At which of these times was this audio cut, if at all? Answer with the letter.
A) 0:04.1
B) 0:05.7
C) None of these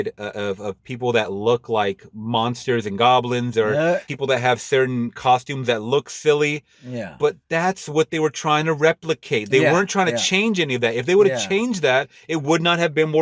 A